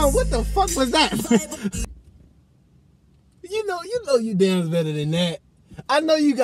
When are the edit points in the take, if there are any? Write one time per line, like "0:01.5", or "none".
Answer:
0:01.8